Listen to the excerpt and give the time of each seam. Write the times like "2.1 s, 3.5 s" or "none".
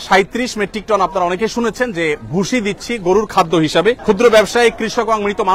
4.0 s